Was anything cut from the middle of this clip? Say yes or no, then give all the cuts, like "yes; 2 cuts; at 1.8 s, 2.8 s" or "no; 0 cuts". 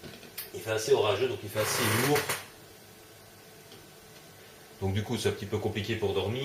yes; 1 cut; at 1.7 s